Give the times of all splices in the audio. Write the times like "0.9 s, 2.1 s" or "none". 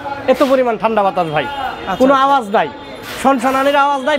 none